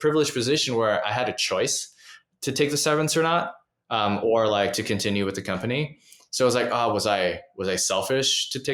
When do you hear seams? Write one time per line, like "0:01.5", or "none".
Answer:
none